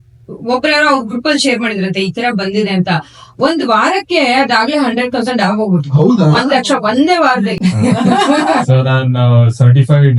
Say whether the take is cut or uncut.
cut